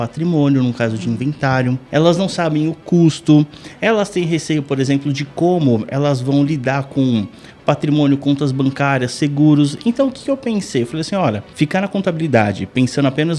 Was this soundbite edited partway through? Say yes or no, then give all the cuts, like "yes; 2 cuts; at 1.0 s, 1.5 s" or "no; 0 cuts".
yes; 2 cuts; at 1.8 s, 11.5 s